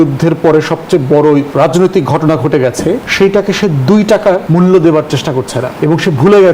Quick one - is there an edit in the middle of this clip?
yes; 4 cuts; at 1.5 s, 3.1 s, 4.4 s, 5.6 s

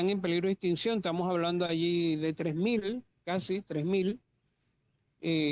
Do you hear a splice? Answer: no; 0 cuts

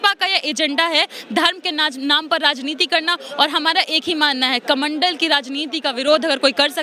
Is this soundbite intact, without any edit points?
yes; 0 cuts

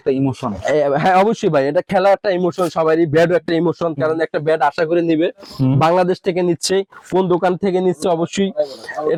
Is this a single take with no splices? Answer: yes; 0 cuts

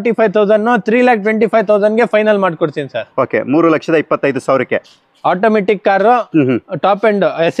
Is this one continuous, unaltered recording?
yes; 0 cuts

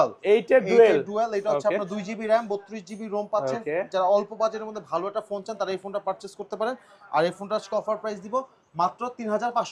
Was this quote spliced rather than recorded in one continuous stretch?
no; 0 cuts

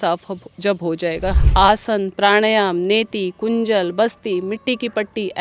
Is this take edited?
yes; 1 cut; at 1.4 s

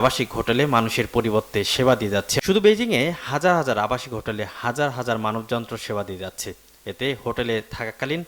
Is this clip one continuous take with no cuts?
no; 1 cut; at 2.3 s

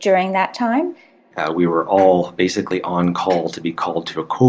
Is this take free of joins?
no; 1 cut; at 1.3 s

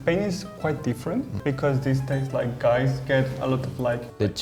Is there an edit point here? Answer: no; 0 cuts

